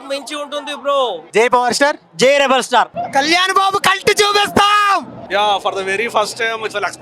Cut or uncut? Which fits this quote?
uncut